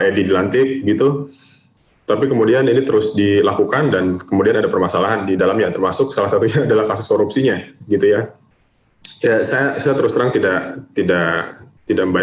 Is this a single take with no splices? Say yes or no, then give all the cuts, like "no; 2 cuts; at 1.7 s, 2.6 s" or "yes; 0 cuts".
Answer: yes; 0 cuts